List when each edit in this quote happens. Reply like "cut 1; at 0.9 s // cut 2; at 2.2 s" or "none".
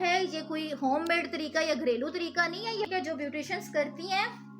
cut 1; at 2.9 s